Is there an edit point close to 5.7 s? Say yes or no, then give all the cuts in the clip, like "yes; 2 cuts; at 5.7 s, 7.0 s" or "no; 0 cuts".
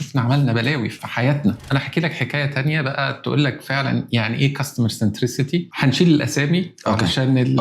yes; 2 cuts; at 1.3 s, 5.7 s